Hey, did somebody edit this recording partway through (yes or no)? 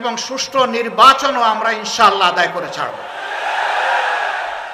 no